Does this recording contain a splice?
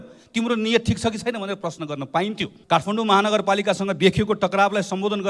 yes; 1 cut; at 2.5 s

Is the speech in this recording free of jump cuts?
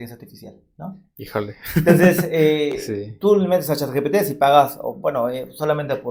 yes; 0 cuts

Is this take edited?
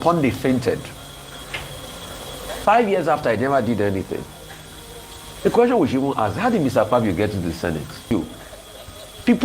yes; 1 cut; at 8.1 s

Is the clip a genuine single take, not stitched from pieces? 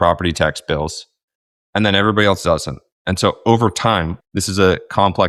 yes; 0 cuts

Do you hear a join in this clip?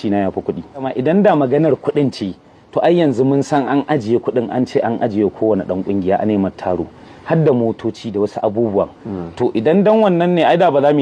yes; 1 cut; at 0.9 s

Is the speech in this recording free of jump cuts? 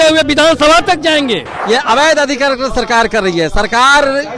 no; 1 cut; at 1.5 s

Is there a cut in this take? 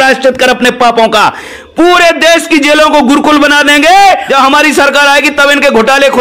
yes; 2 cuts; at 1.6 s, 4.2 s

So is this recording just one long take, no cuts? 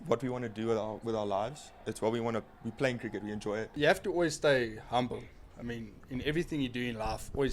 no; 1 cut; at 3.7 s

